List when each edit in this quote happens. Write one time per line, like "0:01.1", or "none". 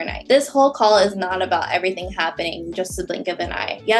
none